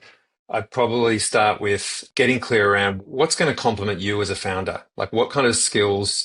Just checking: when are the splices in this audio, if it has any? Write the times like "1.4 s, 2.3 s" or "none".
2.0 s, 3.0 s